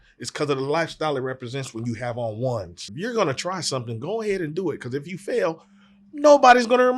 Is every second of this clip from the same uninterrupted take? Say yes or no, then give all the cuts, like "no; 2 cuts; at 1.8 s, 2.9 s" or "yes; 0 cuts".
no; 1 cut; at 2.8 s